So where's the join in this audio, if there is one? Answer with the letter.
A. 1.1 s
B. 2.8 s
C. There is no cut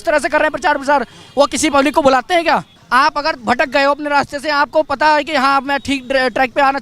B